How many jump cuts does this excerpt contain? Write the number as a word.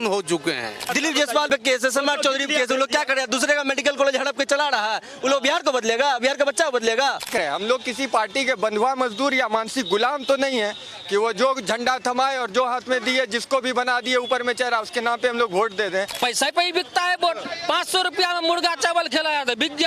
three